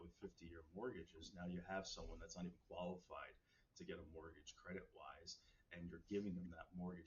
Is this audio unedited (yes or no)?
yes